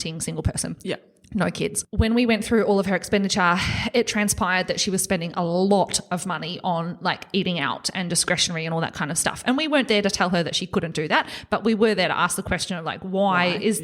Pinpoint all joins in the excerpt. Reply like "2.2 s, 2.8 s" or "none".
1.8 s

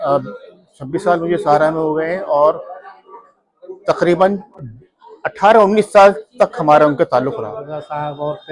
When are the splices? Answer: 7.5 s

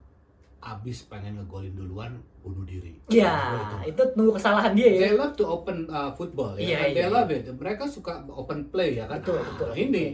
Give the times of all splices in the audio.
none

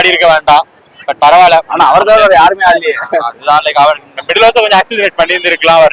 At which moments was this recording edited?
none

